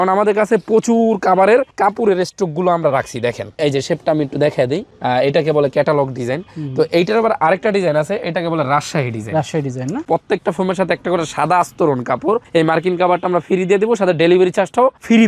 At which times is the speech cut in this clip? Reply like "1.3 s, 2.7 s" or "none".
3.5 s, 10.0 s